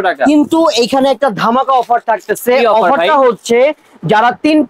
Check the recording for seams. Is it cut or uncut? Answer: uncut